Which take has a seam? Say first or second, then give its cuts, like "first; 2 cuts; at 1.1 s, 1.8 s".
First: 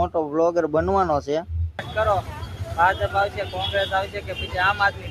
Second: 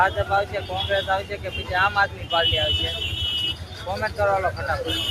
first; 1 cut; at 1.9 s